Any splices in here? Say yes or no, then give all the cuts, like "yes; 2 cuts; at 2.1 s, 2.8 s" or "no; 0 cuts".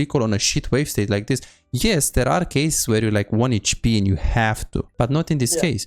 yes; 1 cut; at 4.9 s